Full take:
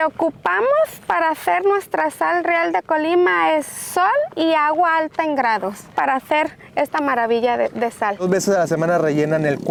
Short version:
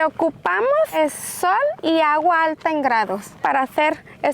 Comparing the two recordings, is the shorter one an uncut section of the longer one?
no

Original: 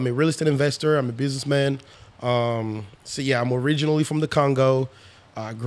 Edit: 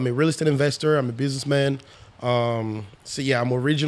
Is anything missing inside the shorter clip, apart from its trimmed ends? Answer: no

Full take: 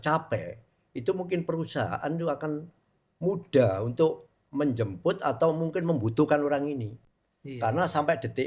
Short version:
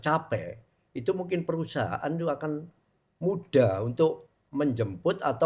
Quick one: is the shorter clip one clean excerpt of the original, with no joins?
yes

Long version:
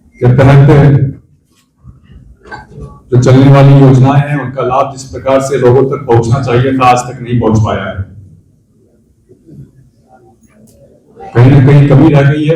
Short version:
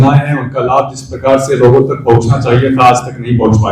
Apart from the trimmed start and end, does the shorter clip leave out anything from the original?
no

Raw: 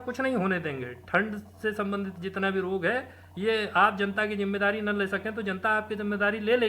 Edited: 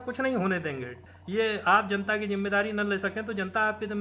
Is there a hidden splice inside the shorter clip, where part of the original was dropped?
yes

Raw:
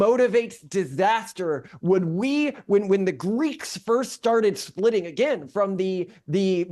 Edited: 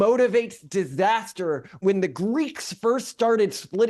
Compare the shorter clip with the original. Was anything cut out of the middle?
yes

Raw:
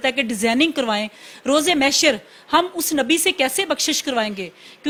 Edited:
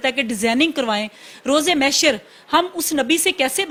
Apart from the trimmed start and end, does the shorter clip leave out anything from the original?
no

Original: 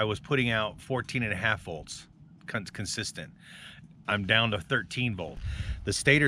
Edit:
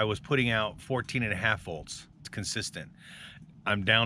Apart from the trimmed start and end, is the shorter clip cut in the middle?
yes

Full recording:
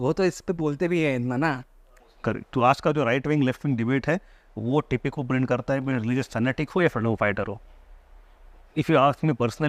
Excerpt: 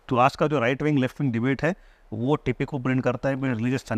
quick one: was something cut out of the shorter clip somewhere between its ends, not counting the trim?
no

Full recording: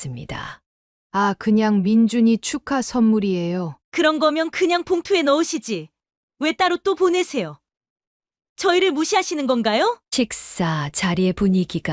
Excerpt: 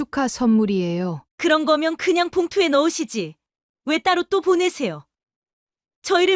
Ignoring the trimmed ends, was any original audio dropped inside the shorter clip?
no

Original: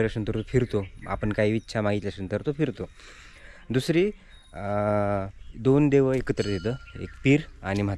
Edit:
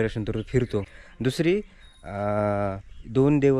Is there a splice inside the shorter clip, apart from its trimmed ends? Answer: yes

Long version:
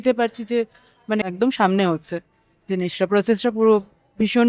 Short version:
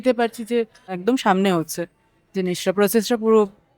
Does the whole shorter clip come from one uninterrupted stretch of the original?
no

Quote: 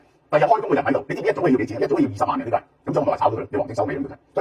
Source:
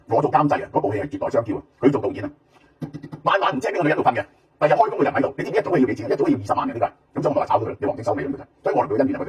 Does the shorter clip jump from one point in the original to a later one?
no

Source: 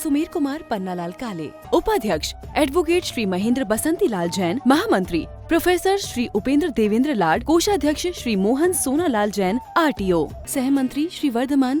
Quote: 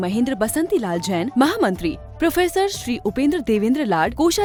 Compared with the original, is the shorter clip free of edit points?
yes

